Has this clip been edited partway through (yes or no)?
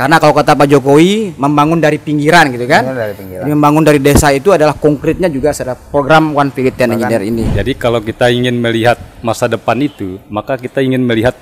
yes